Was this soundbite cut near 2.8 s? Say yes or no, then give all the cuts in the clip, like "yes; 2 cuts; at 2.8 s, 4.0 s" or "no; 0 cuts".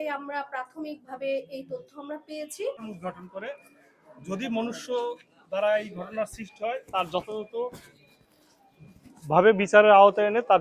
yes; 1 cut; at 2.8 s